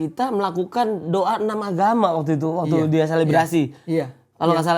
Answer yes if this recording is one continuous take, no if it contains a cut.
yes